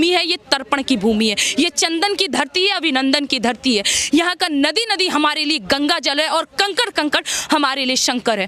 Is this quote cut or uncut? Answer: uncut